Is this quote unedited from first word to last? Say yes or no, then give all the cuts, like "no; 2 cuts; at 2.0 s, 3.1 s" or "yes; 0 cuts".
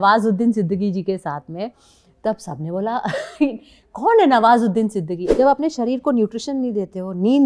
no; 1 cut; at 5.2 s